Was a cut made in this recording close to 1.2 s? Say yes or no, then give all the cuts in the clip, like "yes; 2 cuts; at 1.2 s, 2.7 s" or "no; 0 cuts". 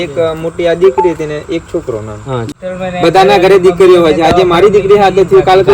no; 1 cut; at 2.5 s